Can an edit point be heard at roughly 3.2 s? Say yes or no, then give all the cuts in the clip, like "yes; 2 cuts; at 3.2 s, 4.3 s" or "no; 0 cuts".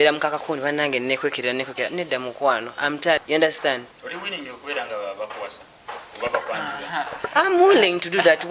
yes; 1 cut; at 3.2 s